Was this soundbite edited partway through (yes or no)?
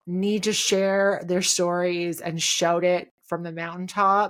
no